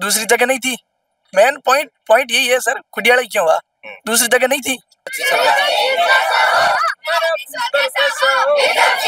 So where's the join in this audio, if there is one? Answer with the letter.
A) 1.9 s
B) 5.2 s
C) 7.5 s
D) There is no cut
B